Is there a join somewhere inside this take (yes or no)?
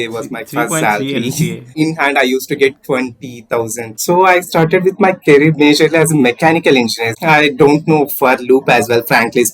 yes